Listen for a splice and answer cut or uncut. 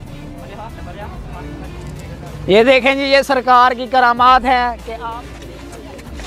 uncut